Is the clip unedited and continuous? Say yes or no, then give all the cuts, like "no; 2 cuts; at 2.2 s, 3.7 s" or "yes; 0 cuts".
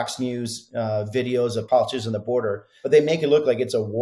no; 1 cut; at 2.7 s